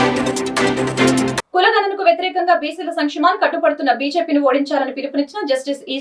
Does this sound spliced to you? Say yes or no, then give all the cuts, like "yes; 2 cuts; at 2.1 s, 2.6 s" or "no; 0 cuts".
yes; 1 cut; at 0.9 s